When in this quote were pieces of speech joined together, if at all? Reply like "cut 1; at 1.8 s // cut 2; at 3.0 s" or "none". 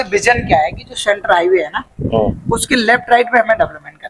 none